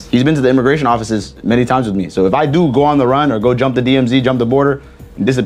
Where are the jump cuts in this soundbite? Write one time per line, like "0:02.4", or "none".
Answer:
none